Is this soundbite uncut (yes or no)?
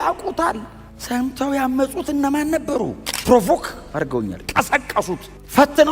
no